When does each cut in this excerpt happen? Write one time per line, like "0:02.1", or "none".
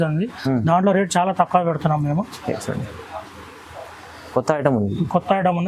none